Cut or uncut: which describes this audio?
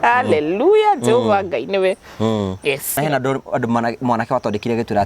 cut